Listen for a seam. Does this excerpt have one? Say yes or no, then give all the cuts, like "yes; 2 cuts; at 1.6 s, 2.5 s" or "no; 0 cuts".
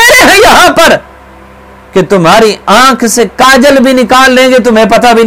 no; 0 cuts